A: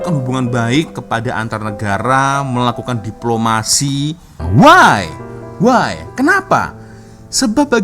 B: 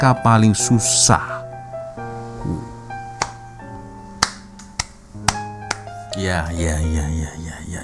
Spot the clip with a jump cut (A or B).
A